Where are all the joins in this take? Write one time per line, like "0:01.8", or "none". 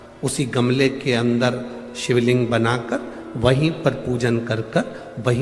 none